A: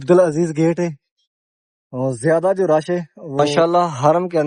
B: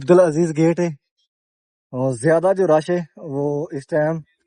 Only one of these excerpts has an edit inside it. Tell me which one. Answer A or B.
A